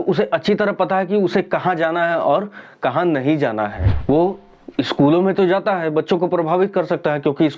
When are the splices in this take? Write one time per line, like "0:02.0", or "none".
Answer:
0:03.9